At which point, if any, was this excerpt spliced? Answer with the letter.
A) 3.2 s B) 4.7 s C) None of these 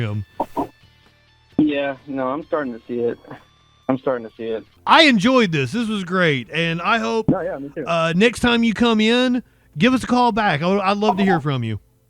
B